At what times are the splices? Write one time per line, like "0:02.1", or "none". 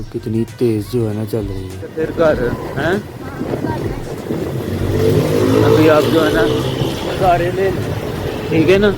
0:01.9